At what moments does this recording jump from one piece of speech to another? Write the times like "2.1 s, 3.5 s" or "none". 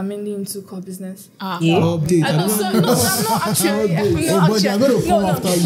none